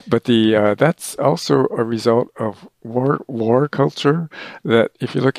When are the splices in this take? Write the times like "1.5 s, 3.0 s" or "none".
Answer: none